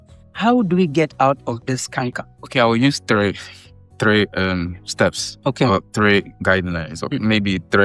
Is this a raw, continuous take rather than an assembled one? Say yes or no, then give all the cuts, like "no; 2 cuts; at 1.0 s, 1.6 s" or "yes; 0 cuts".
yes; 0 cuts